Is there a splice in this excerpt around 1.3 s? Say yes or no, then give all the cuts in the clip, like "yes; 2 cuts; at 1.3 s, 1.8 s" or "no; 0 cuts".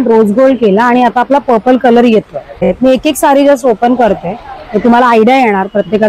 no; 1 cut; at 2.7 s